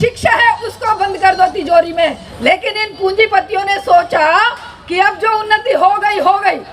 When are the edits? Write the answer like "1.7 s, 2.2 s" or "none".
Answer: 2.3 s